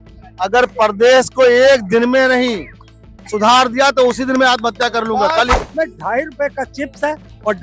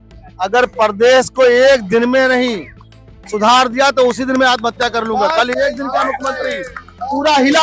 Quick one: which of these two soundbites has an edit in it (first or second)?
first